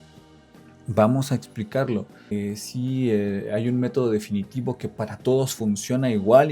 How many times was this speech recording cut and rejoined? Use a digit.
1